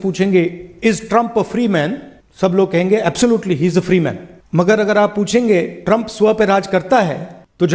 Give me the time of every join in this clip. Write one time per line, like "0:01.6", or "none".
none